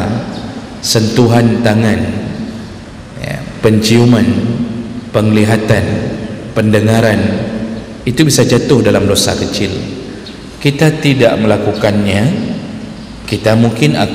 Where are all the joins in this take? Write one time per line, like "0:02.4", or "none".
none

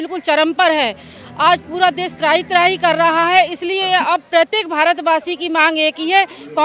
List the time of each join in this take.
none

